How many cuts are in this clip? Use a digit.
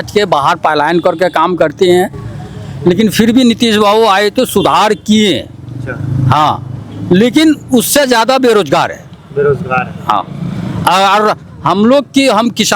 0